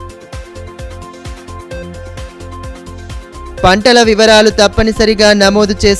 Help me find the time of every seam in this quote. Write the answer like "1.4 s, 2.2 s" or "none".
1.2 s